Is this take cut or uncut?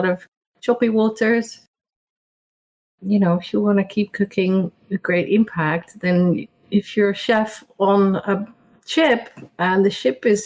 uncut